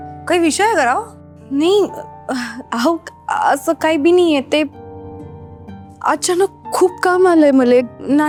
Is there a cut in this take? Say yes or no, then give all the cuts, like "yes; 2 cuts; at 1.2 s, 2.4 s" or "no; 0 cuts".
no; 0 cuts